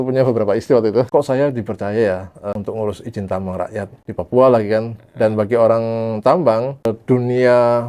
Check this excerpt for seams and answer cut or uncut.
cut